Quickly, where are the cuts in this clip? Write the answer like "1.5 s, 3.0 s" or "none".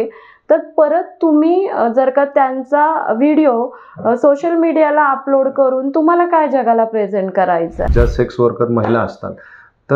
7.9 s